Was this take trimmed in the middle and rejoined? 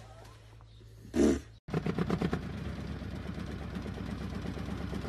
yes; 1 cut; at 1.6 s

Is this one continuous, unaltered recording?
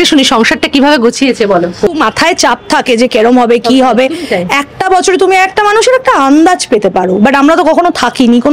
no; 1 cut; at 1.9 s

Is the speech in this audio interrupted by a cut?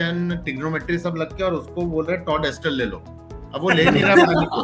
no; 0 cuts

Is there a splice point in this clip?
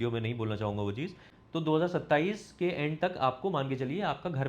yes; 1 cut; at 1.3 s

